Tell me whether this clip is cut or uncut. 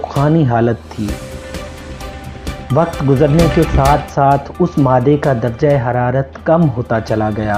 uncut